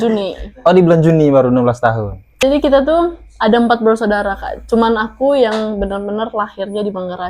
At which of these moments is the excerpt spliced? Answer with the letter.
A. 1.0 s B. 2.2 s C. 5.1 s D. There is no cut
B